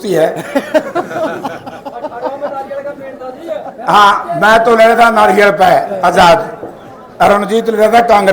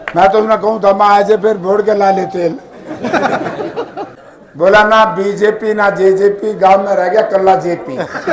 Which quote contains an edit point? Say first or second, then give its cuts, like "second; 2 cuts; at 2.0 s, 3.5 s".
second; 1 cut; at 4.0 s